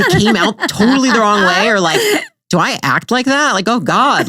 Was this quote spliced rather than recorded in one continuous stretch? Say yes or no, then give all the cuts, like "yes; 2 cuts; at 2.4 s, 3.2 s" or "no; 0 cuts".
no; 0 cuts